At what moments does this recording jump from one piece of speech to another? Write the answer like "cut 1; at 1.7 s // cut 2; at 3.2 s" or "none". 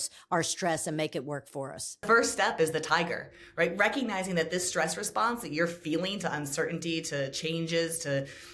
cut 1; at 2.0 s